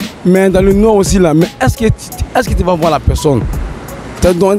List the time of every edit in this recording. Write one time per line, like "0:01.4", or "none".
0:03.6